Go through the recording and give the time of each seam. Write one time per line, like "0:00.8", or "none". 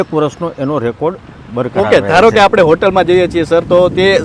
none